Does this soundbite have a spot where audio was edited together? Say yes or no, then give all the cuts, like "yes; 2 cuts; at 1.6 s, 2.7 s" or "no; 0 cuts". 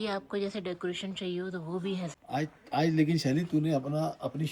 yes; 1 cut; at 2.1 s